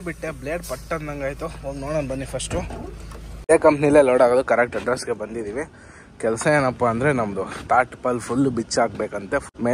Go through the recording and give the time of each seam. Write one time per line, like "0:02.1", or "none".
0:03.5

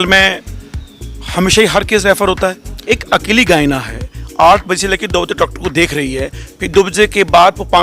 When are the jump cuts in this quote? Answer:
0:02.7

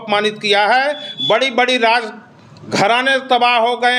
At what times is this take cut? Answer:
none

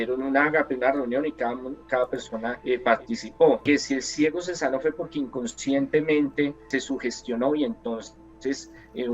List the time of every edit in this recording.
0:02.6
0:03.6
0:06.6

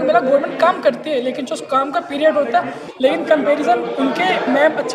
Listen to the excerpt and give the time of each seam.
0:02.8

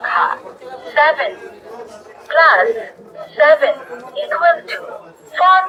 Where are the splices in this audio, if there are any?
none

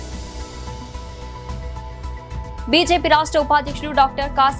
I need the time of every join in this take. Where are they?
0:01.9

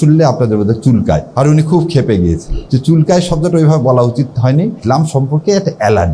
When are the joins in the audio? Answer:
0:01.3
0:02.5
0:04.8

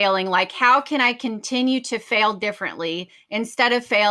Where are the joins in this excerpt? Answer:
none

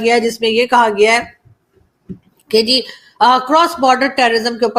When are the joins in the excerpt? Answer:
none

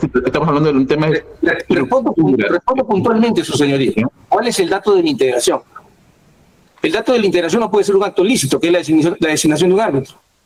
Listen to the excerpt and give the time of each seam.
none

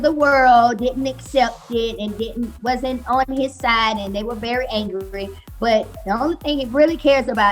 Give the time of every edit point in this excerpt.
none

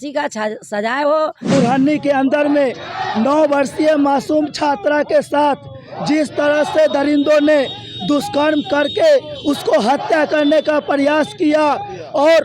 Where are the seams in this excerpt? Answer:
0:01.5

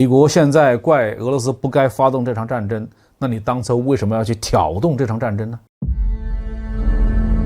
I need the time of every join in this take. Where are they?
0:05.7

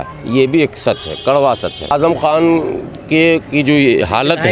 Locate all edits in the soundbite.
0:01.9

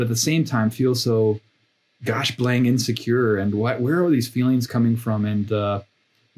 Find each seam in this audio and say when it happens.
none

